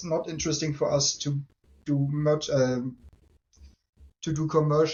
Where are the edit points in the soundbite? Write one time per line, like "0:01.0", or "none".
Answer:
none